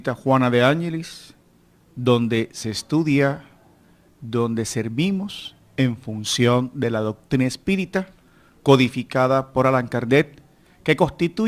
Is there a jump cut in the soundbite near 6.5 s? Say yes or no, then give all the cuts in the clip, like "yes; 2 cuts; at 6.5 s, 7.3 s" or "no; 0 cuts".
yes; 1 cut; at 6.5 s